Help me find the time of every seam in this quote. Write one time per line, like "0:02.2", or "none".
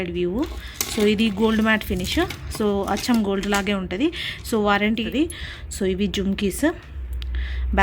0:05.0